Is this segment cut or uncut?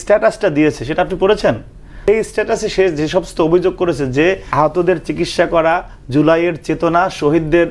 cut